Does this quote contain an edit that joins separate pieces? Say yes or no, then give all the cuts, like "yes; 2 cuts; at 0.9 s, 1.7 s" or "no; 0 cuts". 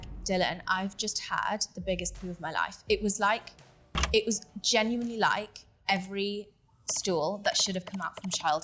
no; 0 cuts